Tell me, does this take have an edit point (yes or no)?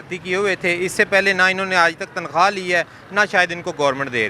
no